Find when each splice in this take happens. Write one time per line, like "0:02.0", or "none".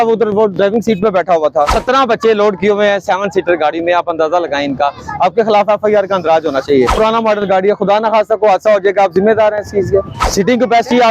0:01.7
0:06.9
0:10.2